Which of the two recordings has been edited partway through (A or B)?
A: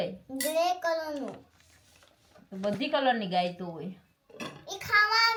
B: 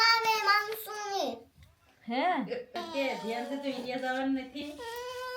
B